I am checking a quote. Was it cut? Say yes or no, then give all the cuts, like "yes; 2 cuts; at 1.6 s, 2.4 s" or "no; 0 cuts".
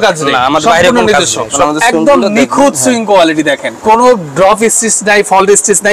yes; 1 cut; at 1.6 s